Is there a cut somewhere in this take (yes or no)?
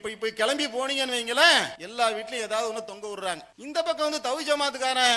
yes